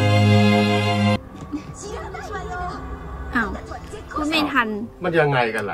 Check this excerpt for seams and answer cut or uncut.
cut